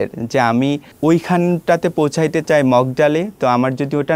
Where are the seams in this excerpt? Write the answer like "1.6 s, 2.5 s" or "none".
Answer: 0.9 s